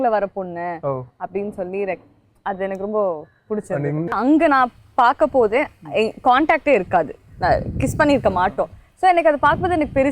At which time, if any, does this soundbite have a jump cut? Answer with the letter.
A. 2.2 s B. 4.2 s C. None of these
B